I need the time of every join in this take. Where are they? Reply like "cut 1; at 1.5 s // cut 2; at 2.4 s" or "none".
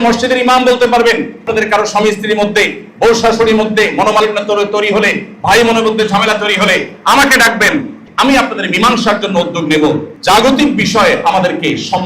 cut 1; at 1.5 s // cut 2; at 8.0 s // cut 3; at 10.1 s